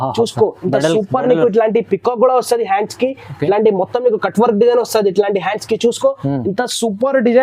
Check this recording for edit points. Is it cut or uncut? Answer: uncut